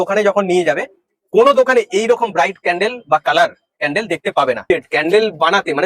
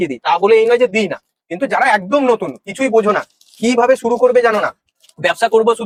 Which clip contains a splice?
first; 1 cut; at 4.7 s

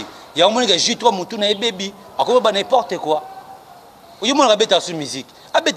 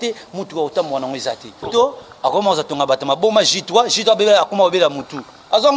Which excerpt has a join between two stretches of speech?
second; 1 cut; at 1.7 s

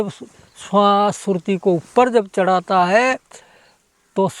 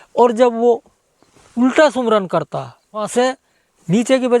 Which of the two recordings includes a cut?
second; 1 cut; at 3.1 s

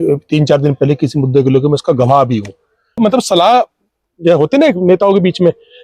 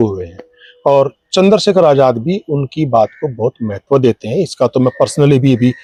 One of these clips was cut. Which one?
first; 1 cut; at 3.0 s

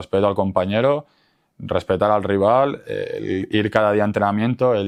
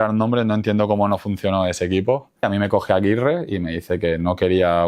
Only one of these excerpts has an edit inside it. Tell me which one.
second; 1 cut; at 2.4 s

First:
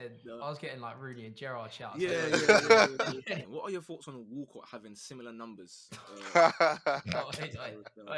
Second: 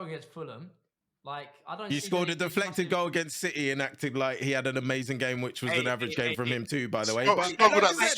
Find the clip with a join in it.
first; 1 cut; at 3.3 s

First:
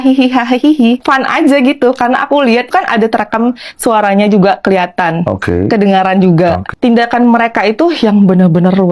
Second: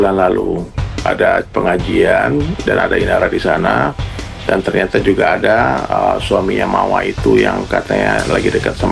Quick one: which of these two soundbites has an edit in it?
first; 3 cuts; at 1.0 s, 2.7 s, 6.7 s

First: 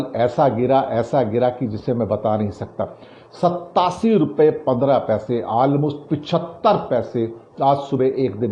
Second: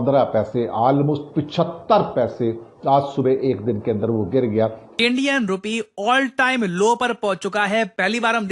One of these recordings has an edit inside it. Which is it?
second; 1 cut; at 4.9 s

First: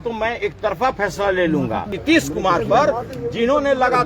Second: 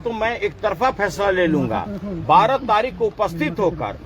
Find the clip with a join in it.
first; 1 cut; at 1.9 s

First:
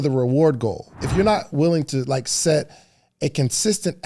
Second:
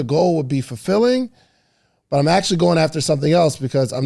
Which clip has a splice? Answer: first; 1 cut; at 1.0 s

